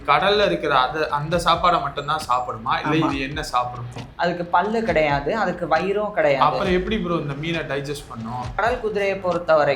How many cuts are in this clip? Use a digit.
2